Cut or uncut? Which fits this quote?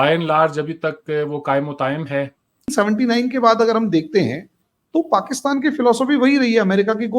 cut